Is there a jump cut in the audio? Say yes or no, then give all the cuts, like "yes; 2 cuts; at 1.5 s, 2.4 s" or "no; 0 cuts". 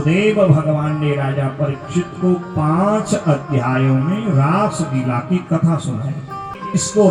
no; 0 cuts